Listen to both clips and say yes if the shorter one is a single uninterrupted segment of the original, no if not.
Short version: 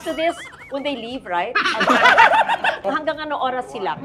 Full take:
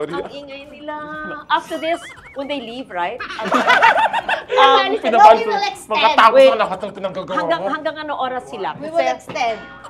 no